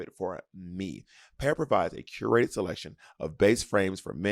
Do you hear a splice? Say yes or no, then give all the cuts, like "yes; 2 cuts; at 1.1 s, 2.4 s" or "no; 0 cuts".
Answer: no; 0 cuts